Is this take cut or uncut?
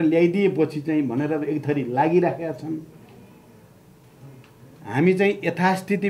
uncut